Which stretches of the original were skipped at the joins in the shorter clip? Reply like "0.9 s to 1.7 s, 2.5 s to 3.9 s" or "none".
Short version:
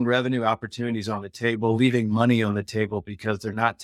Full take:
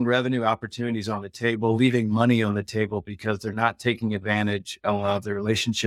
none